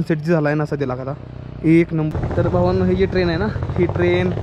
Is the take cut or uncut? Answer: cut